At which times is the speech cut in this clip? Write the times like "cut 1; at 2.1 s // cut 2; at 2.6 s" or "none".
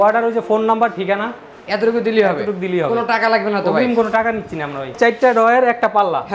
cut 1; at 4.9 s